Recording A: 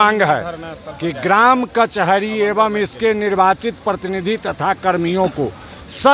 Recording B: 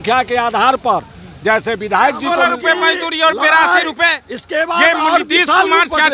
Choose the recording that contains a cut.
B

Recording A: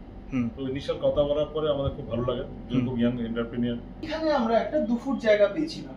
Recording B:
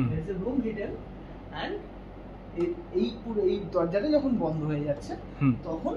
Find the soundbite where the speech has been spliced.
A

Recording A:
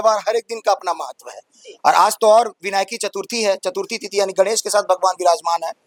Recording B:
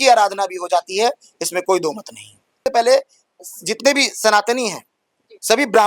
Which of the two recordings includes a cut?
B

